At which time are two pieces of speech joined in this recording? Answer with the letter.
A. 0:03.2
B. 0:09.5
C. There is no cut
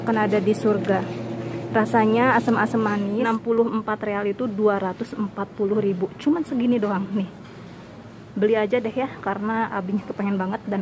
A